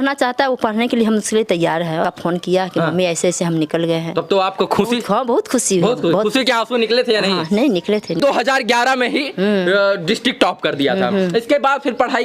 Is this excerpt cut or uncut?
cut